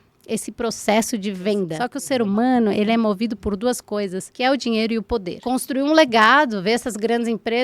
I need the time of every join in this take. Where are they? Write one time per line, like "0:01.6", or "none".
0:01.9
0:04.3
0:05.3